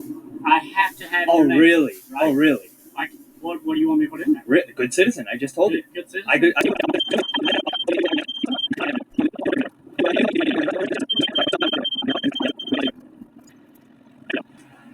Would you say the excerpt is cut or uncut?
uncut